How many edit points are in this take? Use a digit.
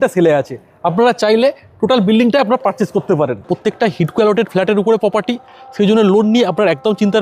1